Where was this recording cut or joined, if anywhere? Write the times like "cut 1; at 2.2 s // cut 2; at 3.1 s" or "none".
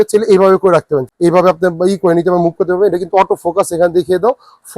cut 1; at 1.1 s